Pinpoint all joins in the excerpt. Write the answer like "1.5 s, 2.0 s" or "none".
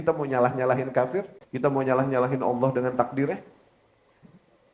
1.4 s

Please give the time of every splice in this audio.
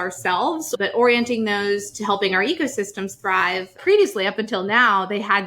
0.8 s, 3.8 s

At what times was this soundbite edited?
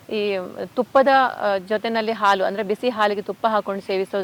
none

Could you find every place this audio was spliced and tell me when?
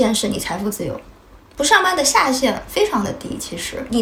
none

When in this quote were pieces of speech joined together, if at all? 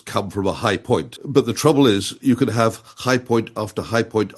1.2 s

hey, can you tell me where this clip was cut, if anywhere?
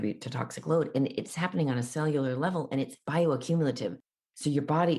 none

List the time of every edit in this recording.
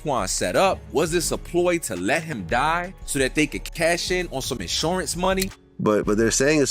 5.5 s

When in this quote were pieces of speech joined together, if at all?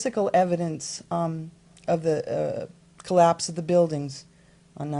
none

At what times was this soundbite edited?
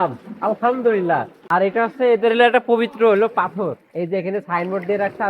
1.4 s

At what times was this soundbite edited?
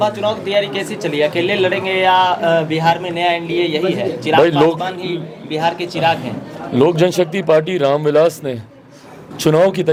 none

